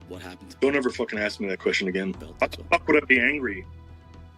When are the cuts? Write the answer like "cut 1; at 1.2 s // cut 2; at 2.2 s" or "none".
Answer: cut 1; at 2.3 s

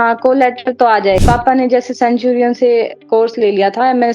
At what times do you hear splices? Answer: cut 1; at 1.2 s

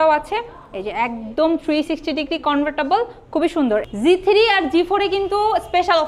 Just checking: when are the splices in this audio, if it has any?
cut 1; at 3.8 s

